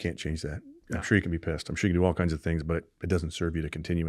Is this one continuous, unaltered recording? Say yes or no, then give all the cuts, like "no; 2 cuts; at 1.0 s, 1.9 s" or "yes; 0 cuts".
yes; 0 cuts